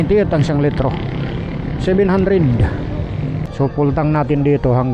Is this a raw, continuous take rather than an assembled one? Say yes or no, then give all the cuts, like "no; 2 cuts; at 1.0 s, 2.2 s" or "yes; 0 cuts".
no; 1 cut; at 3.4 s